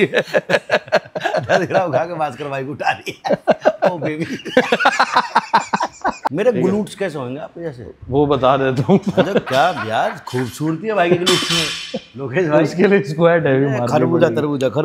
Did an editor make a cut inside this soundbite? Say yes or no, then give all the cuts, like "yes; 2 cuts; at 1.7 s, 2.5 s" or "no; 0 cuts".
yes; 1 cut; at 6.3 s